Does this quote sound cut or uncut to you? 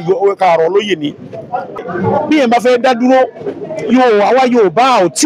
cut